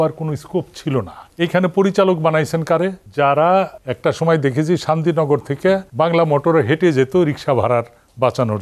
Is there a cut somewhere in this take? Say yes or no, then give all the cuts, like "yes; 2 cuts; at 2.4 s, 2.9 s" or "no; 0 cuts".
yes; 4 cuts; at 1.2 s, 3.0 s, 3.8 s, 5.9 s